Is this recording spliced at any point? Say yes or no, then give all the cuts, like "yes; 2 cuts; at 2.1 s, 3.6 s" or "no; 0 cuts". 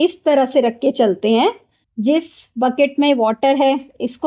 yes; 1 cut; at 1.8 s